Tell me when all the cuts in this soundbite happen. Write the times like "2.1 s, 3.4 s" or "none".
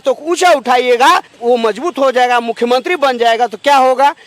1.3 s